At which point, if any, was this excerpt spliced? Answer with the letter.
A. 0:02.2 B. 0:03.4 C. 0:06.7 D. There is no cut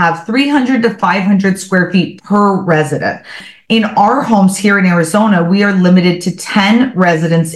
B